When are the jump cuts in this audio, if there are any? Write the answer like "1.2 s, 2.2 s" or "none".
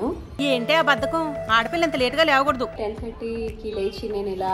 2.7 s